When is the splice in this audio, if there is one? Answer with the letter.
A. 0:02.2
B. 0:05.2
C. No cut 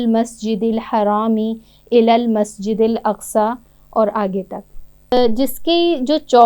B